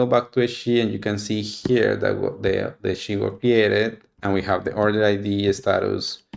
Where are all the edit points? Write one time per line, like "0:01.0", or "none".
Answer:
none